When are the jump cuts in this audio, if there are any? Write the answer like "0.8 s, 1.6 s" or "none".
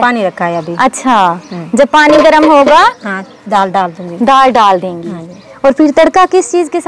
none